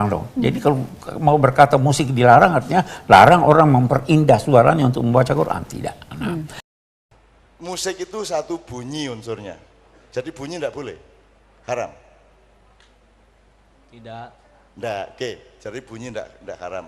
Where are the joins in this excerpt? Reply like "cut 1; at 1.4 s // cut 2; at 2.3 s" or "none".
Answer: cut 1; at 6.6 s

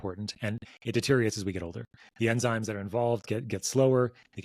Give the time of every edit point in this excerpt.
none

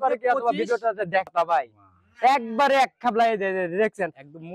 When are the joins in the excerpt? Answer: cut 1; at 1.3 s

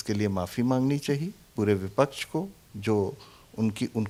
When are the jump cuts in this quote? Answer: none

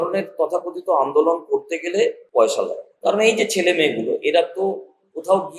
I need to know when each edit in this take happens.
cut 1; at 2.2 s // cut 2; at 2.9 s

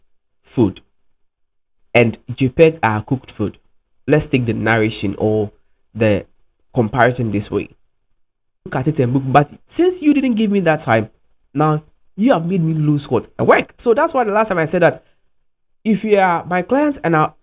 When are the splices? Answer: cut 1; at 8.7 s

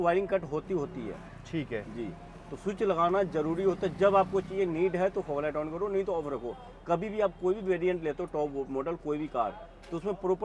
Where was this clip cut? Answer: none

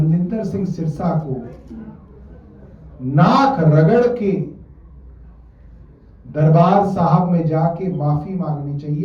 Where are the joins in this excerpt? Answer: none

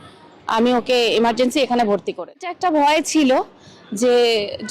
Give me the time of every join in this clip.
cut 1; at 2.4 s

